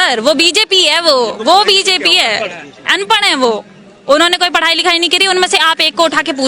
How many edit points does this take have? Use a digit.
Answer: 0